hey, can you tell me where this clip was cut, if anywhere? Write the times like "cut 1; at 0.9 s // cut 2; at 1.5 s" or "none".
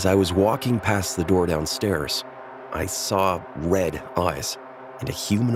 none

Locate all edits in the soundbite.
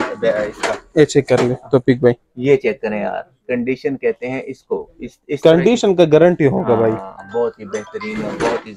none

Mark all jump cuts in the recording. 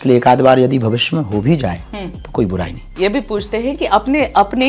cut 1; at 2.8 s

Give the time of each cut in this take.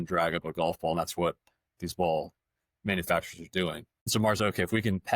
cut 1; at 3.9 s

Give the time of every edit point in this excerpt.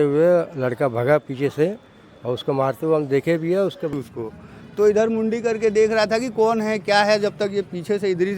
cut 1; at 3.9 s

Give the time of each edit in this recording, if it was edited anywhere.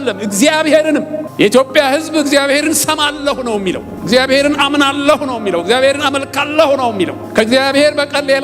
cut 1; at 1.2 s // cut 2; at 3.9 s // cut 3; at 7.2 s

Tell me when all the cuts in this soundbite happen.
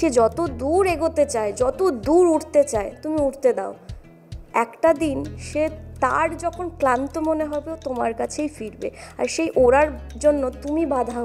none

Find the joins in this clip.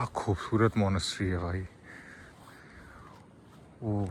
none

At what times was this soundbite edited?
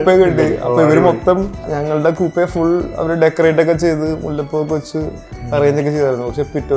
cut 1; at 1.6 s

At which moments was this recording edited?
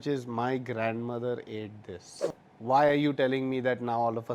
cut 1; at 2.2 s

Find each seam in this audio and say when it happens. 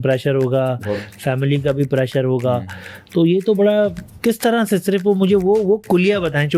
none

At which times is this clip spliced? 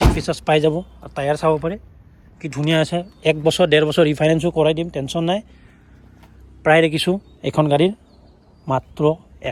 none

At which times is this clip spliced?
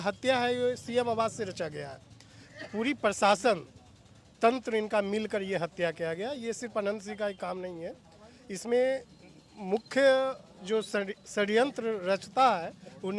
none

